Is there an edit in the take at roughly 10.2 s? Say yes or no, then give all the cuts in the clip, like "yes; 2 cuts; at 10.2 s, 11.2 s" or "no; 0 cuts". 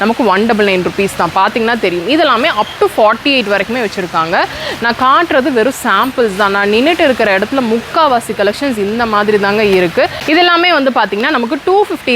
yes; 1 cut; at 10.2 s